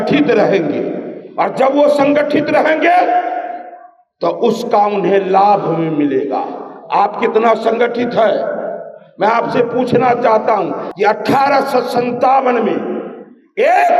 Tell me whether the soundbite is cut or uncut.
cut